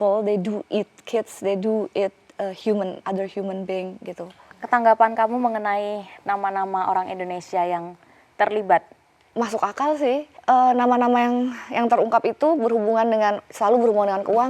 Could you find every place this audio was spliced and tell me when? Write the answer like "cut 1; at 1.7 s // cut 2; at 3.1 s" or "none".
cut 1; at 4.3 s // cut 2; at 9.2 s // cut 3; at 10.3 s